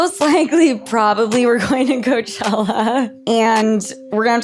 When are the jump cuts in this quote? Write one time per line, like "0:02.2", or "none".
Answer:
0:03.2